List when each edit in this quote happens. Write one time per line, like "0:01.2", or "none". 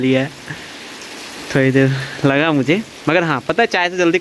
none